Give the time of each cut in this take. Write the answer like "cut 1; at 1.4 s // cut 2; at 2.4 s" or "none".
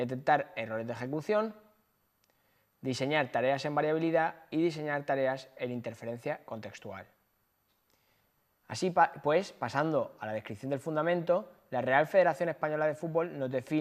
cut 1; at 11.6 s